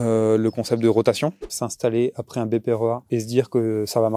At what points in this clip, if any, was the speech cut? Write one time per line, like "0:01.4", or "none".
0:01.5
0:03.0